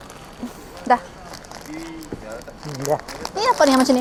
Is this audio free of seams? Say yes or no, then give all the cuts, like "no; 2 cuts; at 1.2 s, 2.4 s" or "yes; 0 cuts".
yes; 0 cuts